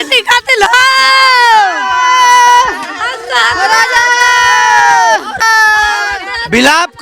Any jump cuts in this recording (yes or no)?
yes